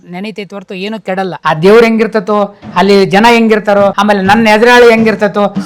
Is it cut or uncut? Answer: cut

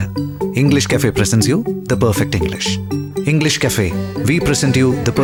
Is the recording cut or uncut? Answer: uncut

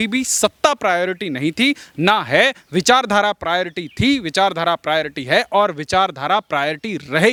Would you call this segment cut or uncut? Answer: uncut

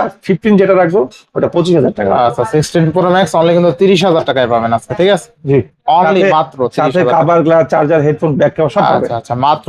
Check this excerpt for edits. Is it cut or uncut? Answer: uncut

